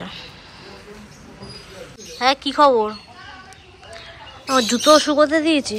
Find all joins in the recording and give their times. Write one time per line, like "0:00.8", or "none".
0:01.9